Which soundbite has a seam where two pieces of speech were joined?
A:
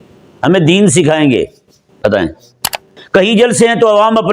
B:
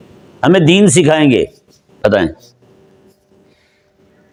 A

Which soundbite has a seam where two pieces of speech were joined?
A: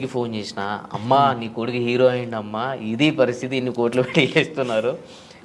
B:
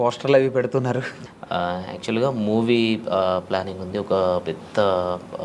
B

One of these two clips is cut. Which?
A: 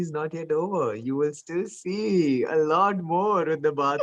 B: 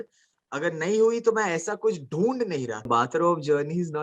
B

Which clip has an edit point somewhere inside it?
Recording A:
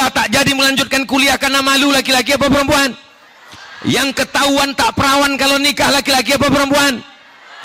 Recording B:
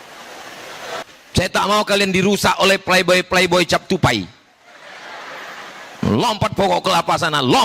B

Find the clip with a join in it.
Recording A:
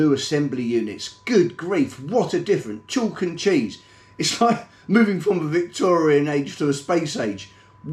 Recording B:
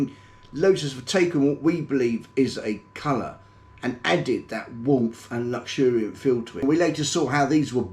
B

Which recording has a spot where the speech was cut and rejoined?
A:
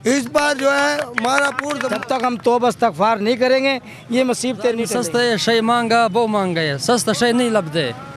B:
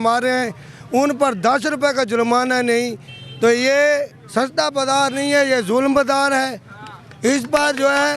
A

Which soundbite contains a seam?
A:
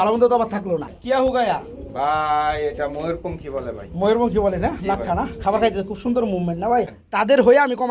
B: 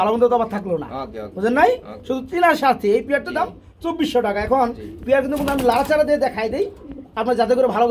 A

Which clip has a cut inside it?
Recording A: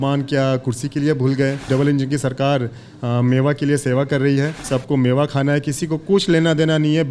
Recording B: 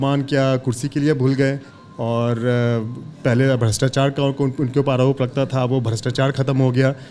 A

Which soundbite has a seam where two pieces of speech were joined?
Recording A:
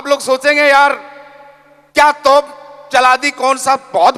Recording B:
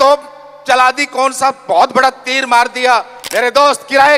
B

